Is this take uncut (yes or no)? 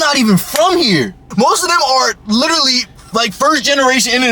no